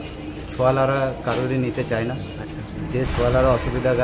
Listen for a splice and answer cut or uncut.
uncut